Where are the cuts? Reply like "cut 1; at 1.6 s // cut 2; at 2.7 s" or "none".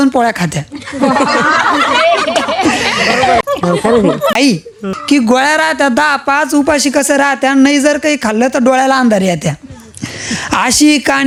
none